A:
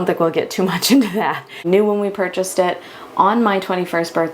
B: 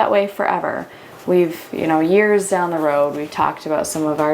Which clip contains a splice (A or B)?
A